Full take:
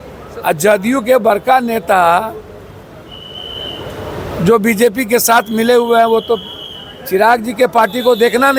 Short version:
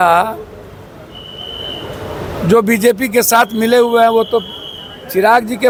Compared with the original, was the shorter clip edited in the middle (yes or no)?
no